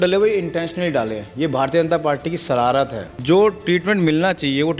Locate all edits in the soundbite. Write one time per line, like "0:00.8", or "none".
0:03.1